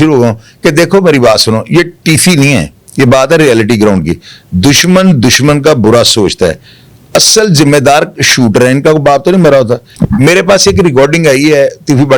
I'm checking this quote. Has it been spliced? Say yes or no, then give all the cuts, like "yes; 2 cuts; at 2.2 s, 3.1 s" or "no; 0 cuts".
yes; 1 cut; at 9.9 s